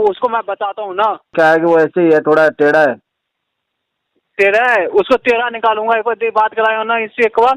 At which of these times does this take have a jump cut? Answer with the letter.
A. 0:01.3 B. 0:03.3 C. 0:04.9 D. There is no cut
A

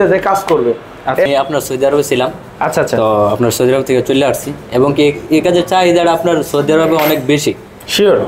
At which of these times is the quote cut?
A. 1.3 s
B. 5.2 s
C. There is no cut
A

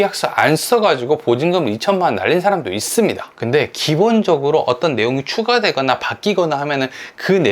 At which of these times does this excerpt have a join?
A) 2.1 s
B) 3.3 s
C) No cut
B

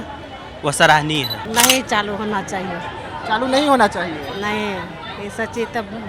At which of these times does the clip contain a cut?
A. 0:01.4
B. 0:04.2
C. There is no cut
A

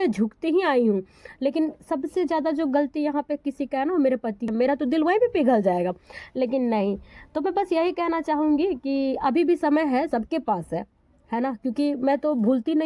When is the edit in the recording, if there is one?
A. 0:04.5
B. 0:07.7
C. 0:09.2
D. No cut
A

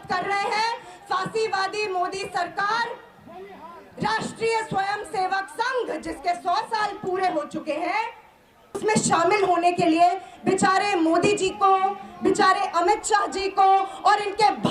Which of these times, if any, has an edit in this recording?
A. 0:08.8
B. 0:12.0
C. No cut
A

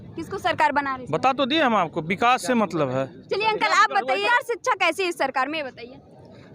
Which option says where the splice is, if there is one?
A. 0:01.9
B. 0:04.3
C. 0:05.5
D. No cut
B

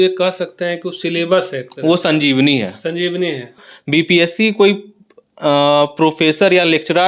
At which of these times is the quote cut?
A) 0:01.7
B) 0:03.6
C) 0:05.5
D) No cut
B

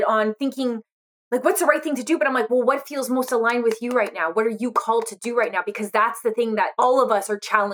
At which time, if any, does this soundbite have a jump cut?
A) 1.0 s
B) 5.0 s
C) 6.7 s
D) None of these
C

